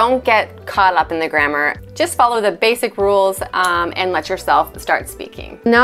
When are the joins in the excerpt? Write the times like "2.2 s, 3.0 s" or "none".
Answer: none